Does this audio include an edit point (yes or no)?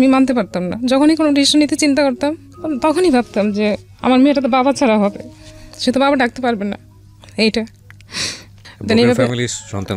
no